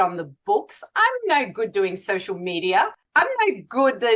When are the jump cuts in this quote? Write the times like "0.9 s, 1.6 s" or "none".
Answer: 3.0 s